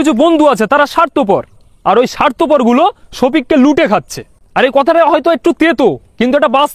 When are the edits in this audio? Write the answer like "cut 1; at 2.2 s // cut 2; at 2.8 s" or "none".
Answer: none